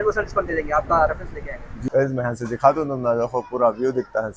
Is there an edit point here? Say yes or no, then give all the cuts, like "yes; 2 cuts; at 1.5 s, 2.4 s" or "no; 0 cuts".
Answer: yes; 1 cut; at 1.7 s